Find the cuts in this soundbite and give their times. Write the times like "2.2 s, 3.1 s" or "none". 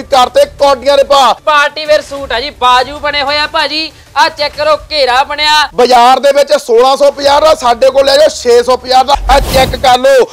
1.4 s, 5.7 s, 9.2 s